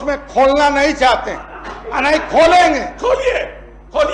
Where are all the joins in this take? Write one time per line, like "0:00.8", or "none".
none